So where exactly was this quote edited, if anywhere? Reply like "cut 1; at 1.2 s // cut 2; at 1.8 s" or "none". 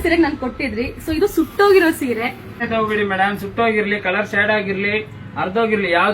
cut 1; at 2.6 s